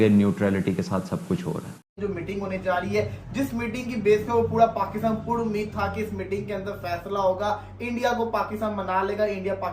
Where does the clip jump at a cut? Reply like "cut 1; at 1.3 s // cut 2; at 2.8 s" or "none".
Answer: cut 1; at 2.0 s